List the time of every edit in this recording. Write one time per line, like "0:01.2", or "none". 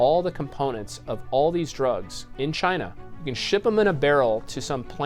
0:03.0